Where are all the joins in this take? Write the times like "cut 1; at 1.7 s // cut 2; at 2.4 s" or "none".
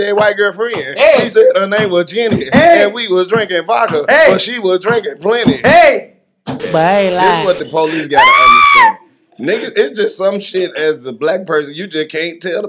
cut 1; at 6.6 s